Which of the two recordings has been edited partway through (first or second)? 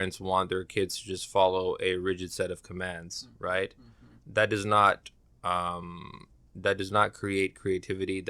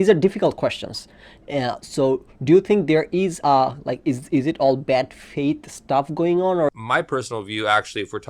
second